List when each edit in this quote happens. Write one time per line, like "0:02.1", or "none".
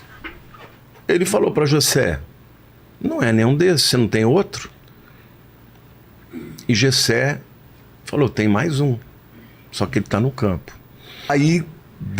0:11.3